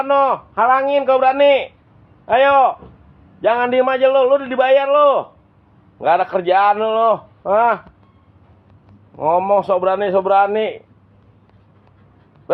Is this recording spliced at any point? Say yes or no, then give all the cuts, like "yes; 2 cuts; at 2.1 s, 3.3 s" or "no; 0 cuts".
no; 0 cuts